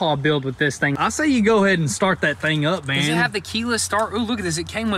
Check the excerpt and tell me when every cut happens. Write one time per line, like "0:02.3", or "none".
0:01.0